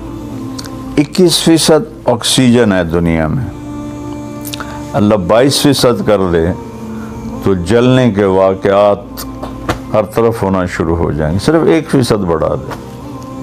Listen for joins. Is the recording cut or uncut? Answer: cut